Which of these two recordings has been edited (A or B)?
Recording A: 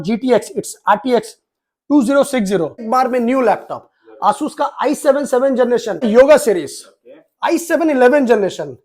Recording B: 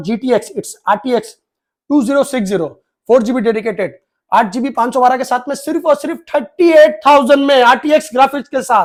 A